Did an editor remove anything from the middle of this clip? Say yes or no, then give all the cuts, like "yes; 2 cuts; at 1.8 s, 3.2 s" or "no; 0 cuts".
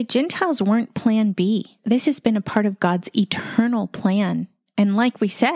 yes; 1 cut; at 1.7 s